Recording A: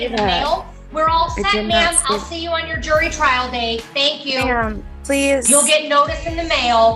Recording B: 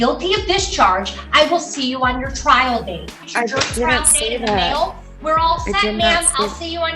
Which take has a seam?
B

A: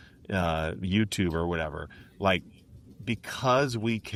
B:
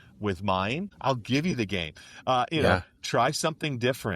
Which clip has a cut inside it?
B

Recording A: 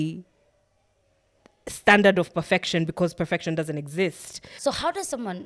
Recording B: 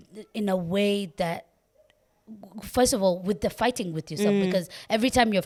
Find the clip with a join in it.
A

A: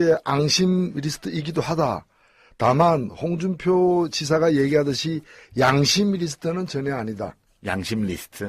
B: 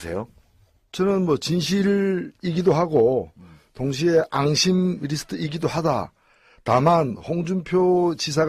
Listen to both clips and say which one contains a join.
A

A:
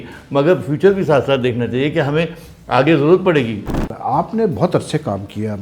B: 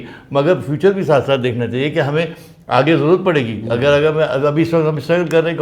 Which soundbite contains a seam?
A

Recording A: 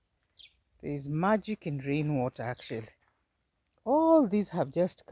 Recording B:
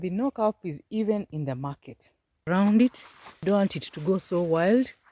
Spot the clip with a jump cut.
B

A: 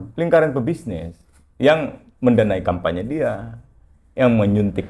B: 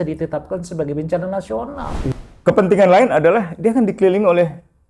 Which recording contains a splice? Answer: B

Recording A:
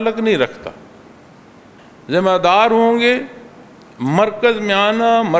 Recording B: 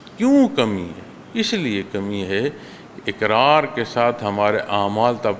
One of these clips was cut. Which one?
A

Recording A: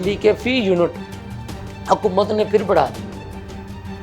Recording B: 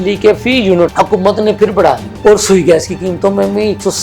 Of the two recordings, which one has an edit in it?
B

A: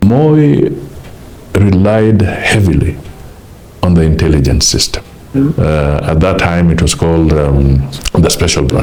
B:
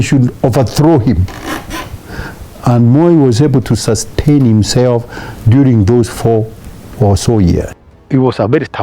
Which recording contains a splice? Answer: B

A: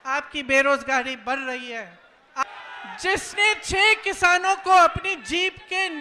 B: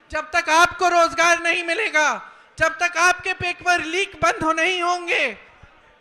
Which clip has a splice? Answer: A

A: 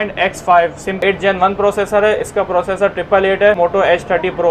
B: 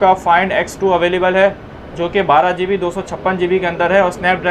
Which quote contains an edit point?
A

